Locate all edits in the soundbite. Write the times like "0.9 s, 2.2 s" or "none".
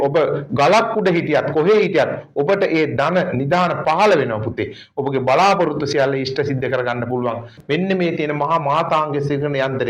7.5 s